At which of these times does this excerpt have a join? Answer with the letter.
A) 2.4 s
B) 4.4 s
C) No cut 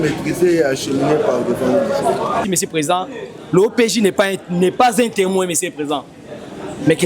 A